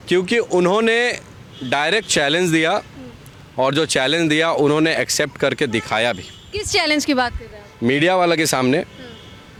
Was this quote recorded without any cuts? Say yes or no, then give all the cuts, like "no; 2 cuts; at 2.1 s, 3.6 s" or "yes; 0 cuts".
yes; 0 cuts